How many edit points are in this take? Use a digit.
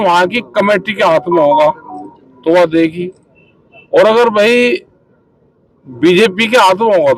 0